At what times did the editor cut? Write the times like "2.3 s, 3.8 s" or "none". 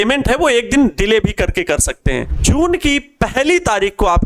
2.3 s